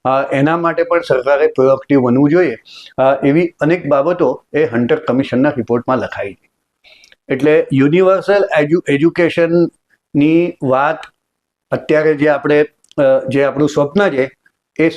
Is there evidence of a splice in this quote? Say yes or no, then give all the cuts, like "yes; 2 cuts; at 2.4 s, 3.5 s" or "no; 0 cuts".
no; 0 cuts